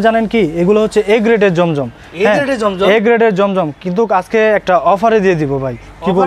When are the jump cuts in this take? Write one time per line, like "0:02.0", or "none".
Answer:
none